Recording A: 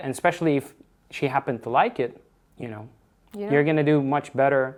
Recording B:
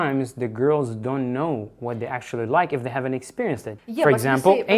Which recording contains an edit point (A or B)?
B